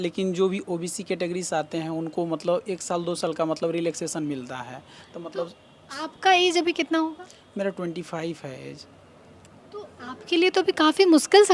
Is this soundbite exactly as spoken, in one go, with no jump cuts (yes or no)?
yes